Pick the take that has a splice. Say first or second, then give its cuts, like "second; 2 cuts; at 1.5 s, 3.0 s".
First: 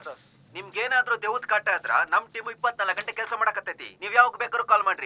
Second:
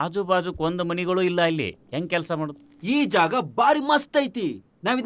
second; 1 cut; at 2.6 s